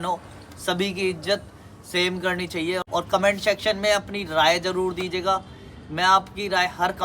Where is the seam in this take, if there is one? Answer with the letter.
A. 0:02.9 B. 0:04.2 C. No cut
A